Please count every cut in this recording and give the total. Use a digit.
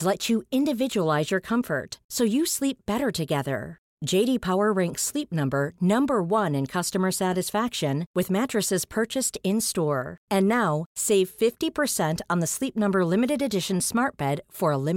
0